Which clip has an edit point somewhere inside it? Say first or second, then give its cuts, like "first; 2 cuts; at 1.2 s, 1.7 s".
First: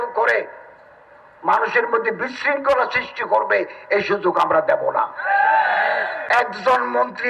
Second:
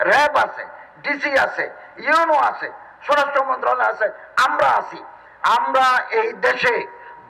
first; 1 cut; at 6.2 s